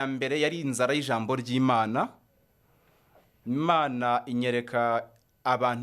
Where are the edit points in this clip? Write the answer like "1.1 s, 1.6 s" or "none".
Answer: none